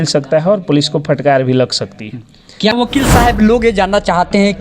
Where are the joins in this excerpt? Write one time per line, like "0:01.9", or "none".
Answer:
0:02.7